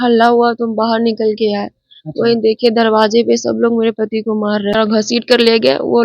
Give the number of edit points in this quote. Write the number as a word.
one